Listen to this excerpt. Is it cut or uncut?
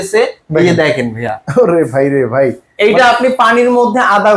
uncut